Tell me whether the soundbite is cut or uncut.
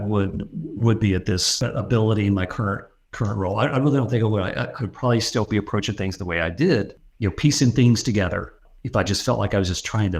cut